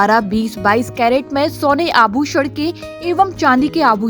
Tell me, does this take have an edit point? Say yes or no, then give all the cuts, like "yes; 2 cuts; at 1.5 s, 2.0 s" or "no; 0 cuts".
no; 0 cuts